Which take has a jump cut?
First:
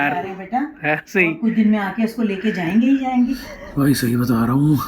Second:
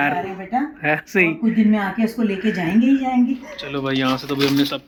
first; 1 cut; at 3.6 s

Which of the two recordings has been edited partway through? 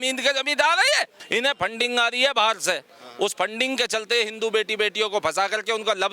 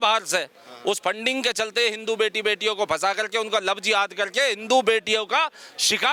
first; 1 cut; at 1.2 s

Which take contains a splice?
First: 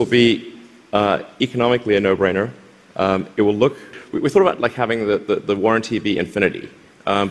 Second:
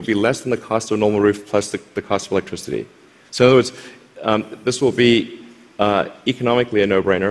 first; 1 cut; at 4.0 s

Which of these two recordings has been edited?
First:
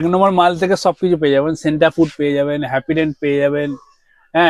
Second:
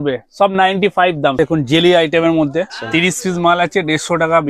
second; 2 cuts; at 1.4 s, 2.8 s

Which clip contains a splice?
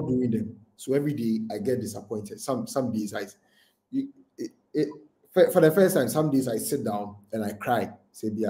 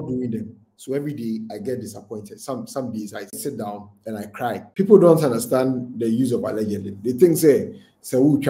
second; 2 cuts; at 3.4 s, 4.6 s

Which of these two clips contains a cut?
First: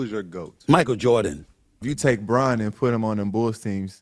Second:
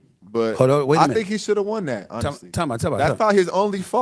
first; 1 cut; at 1.8 s

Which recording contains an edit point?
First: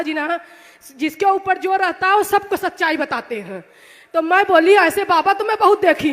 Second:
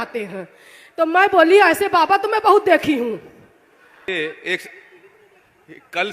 second; 1 cut; at 4.1 s

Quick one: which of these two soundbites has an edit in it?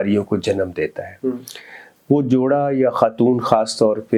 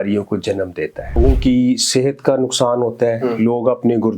second; 1 cut; at 1.2 s

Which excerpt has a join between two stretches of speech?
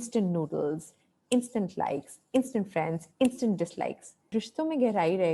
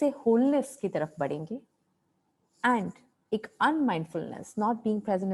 first; 1 cut; at 4.3 s

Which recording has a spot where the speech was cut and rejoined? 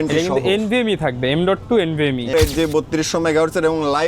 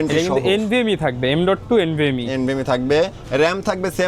first; 1 cut; at 2.3 s

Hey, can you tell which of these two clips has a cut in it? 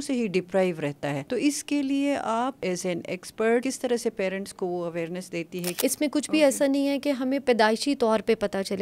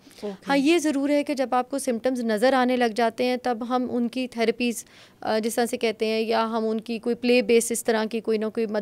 first; 4 cuts; at 1.2 s, 2.6 s, 3.6 s, 5.6 s

